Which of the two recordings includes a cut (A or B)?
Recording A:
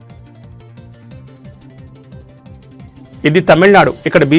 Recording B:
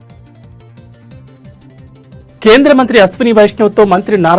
B